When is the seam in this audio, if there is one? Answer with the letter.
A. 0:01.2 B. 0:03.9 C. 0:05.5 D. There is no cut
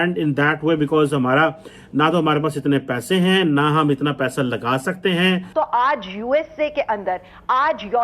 C